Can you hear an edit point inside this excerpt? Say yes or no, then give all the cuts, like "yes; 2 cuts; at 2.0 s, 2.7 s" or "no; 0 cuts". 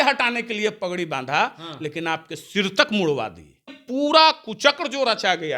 yes; 1 cut; at 3.8 s